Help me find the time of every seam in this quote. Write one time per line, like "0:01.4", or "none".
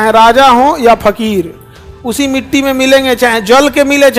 none